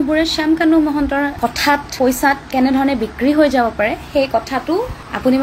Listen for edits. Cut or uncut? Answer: uncut